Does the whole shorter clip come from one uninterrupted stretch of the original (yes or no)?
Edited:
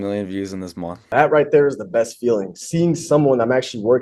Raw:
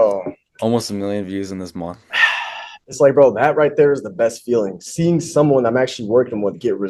no